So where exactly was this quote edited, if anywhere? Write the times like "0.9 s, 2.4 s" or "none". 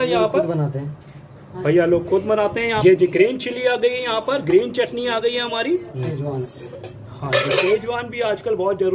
2.8 s, 6.1 s